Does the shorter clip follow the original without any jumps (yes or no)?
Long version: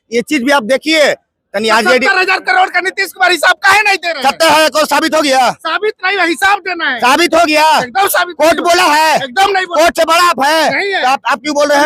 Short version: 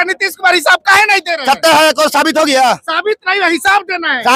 yes